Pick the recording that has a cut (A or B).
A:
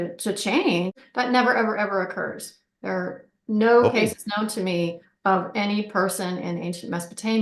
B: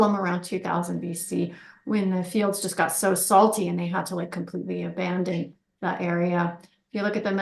A